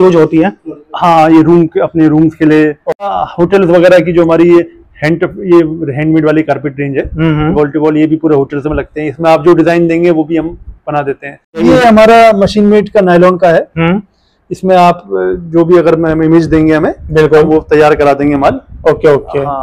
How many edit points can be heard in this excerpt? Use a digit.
2